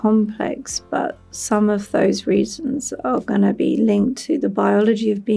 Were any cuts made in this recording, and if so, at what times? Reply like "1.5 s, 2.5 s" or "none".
none